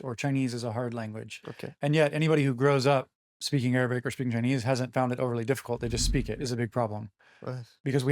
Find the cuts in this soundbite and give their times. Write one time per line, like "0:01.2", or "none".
0:06.3

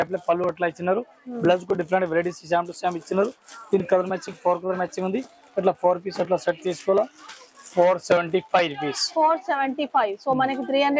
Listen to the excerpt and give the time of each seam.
none

